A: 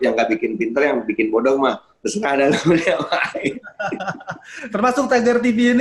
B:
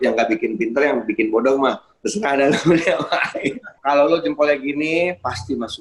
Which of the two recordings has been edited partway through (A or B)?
B